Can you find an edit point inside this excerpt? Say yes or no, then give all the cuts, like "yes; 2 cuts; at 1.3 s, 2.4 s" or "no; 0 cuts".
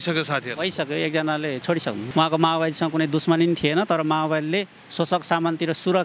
yes; 1 cut; at 2.0 s